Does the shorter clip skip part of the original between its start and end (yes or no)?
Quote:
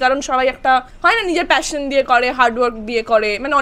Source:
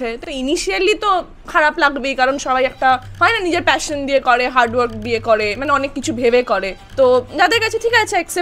no